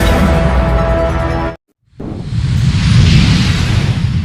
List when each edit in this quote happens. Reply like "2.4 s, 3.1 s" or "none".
1.6 s